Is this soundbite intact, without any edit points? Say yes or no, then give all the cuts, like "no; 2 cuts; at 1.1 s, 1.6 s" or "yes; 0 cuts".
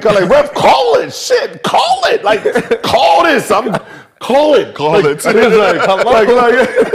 yes; 0 cuts